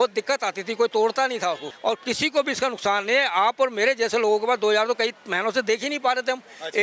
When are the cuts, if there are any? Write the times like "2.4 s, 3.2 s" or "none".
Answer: 1.7 s